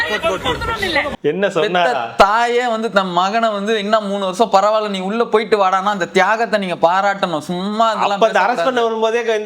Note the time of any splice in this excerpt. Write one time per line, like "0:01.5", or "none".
0:01.2